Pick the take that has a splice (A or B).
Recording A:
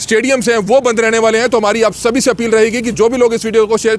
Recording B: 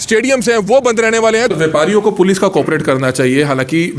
B